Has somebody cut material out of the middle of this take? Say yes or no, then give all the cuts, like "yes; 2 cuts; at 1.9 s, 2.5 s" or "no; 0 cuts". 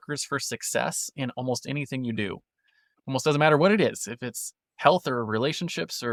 no; 0 cuts